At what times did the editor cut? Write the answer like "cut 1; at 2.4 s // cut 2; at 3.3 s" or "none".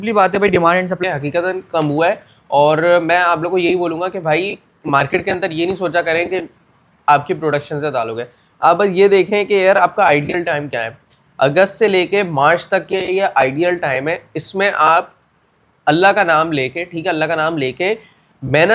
cut 1; at 1.0 s